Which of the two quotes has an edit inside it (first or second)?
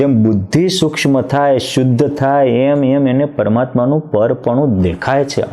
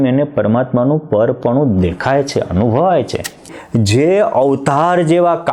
second